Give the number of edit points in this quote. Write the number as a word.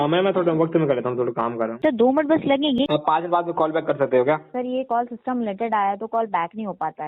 three